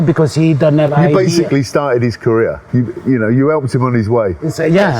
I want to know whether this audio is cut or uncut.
uncut